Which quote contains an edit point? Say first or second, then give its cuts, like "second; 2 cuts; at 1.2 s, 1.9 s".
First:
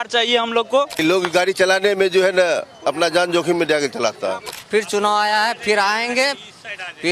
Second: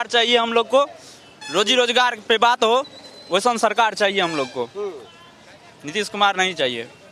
first; 2 cuts; at 0.9 s, 4.5 s